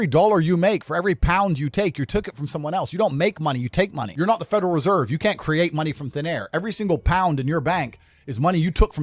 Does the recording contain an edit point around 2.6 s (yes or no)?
no